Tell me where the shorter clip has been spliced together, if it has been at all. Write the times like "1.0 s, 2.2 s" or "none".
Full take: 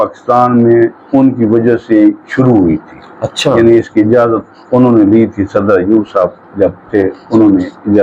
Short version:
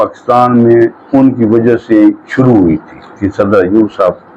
3.2 s